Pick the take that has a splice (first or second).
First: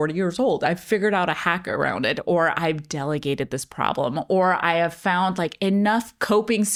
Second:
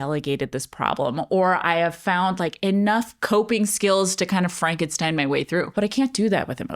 second